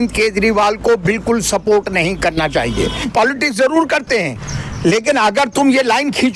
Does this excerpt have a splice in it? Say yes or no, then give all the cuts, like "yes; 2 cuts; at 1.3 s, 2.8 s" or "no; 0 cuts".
yes; 1 cut; at 3.1 s